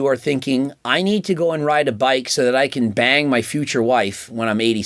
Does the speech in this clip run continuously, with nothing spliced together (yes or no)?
yes